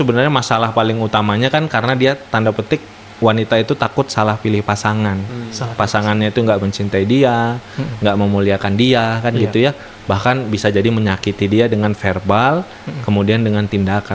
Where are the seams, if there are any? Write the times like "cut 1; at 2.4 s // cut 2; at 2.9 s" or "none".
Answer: none